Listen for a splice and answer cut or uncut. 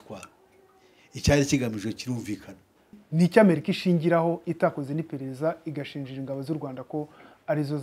cut